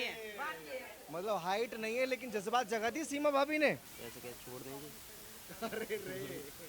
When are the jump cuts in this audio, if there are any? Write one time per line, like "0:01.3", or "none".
0:01.0
0:03.9